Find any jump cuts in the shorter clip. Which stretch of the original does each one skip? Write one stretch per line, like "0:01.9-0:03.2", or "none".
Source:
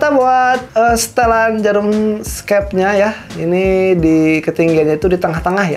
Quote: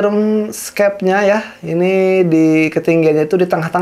none